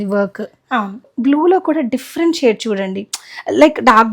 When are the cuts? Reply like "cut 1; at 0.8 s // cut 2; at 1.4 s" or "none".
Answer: cut 1; at 1.1 s